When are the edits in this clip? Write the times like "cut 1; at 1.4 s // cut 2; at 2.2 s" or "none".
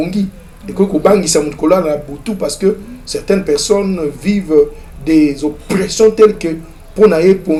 none